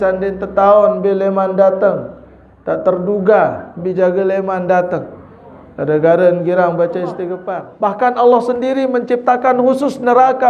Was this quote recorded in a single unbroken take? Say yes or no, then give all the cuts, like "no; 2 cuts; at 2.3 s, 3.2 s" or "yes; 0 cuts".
no; 1 cut; at 7.3 s